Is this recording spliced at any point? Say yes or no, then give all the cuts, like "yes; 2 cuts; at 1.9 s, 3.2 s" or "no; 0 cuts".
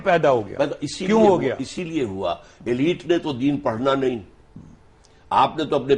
no; 0 cuts